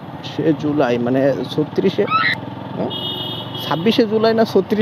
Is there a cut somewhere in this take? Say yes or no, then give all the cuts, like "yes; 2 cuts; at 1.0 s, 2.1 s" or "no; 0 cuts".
no; 0 cuts